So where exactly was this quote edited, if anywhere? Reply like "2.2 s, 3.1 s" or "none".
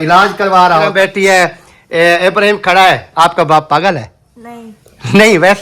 0.9 s